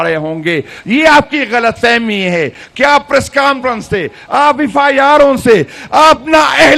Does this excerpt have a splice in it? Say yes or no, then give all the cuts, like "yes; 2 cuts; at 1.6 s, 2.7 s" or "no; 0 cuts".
no; 0 cuts